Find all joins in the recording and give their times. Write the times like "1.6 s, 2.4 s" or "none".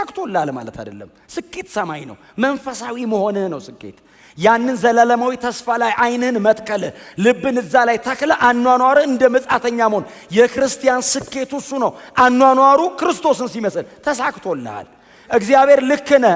none